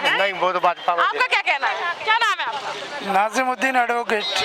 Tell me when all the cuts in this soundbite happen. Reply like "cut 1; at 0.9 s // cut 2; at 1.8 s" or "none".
none